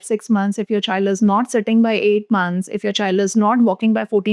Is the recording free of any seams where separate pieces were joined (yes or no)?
yes